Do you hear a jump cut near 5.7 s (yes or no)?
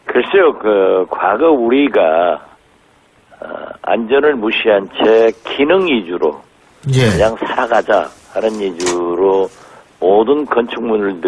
yes